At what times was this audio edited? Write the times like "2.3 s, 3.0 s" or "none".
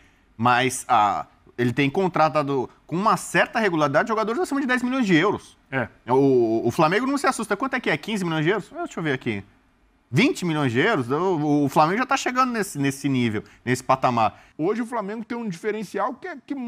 14.4 s